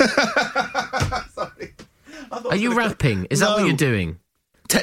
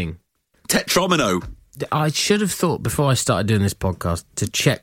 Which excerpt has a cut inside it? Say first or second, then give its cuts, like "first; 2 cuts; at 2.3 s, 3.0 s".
second; 1 cut; at 1.7 s